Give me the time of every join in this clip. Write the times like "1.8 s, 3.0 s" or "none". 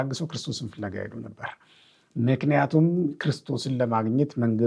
none